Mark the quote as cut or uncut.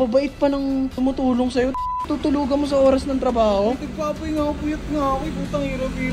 uncut